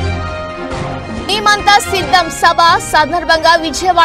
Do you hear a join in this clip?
yes; 1 cut; at 1.0 s

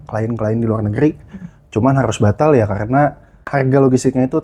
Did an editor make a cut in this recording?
yes; 1 cut; at 3.5 s

